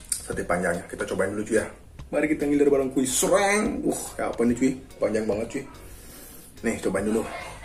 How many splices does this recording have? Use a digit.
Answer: 0